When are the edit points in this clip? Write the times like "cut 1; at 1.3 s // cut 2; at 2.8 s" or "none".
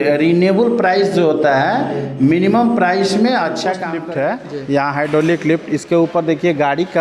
cut 1; at 3.9 s